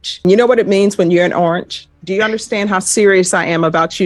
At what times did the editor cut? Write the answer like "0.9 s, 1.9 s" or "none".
1.9 s